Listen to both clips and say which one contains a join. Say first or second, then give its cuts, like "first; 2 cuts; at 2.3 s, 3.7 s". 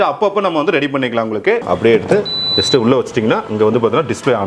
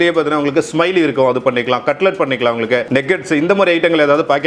first; 1 cut; at 1.6 s